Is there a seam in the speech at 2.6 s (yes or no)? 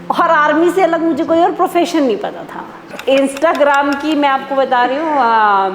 yes